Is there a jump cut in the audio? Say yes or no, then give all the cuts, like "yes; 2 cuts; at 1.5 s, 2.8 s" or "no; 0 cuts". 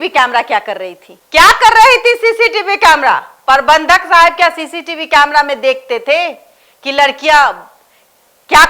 no; 0 cuts